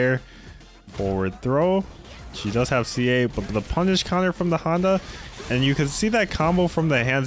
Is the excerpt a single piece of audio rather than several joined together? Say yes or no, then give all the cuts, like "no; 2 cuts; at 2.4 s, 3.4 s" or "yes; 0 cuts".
yes; 0 cuts